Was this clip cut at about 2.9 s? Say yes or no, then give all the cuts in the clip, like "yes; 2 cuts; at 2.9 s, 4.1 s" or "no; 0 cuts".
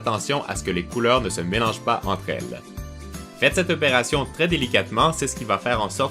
yes; 1 cut; at 2.9 s